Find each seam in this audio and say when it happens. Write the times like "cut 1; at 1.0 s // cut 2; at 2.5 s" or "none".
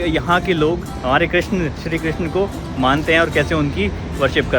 cut 1; at 0.9 s